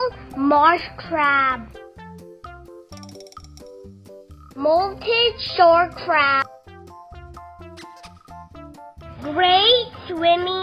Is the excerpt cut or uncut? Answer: cut